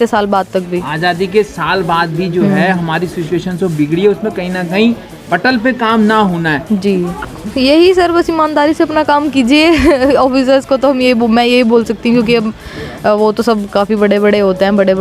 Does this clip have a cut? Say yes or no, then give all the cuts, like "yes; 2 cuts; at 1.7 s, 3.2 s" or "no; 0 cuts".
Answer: yes; 1 cut; at 7.2 s